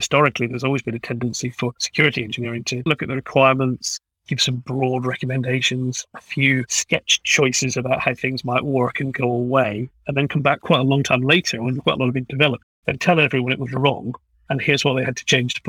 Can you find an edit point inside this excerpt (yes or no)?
no